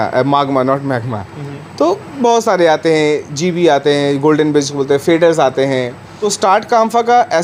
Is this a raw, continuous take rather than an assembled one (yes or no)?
yes